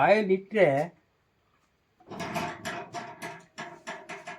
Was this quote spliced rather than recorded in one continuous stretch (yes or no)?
no